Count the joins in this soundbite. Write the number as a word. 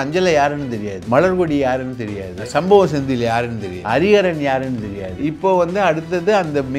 four